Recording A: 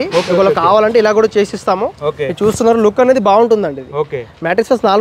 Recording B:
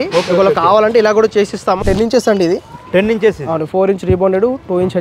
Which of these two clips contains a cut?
B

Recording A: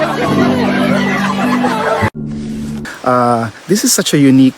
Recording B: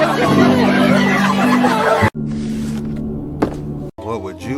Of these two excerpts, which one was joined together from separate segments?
A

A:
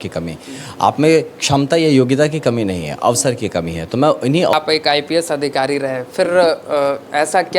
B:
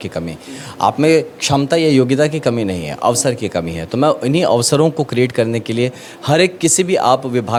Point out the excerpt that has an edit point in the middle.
A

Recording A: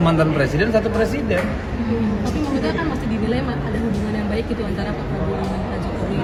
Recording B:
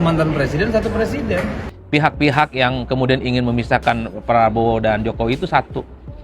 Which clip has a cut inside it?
B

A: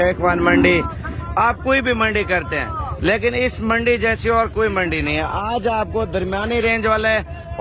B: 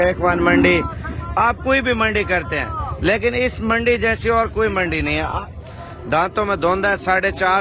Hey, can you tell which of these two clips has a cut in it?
B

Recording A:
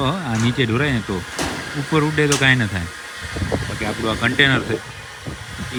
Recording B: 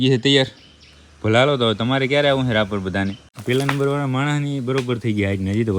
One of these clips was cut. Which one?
B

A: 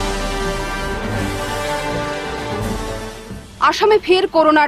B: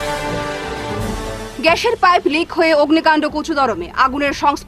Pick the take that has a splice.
B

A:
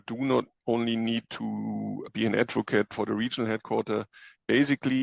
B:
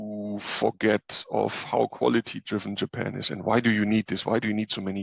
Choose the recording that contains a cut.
A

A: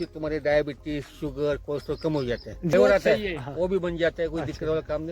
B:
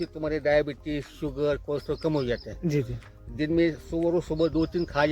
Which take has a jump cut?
A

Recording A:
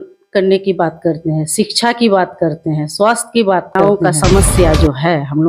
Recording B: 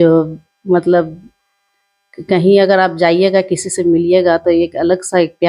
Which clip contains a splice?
A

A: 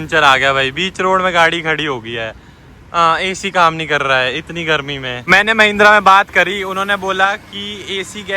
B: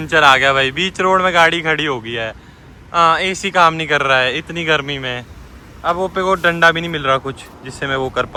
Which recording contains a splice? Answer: A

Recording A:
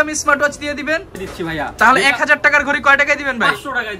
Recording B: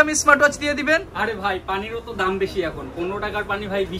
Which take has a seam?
A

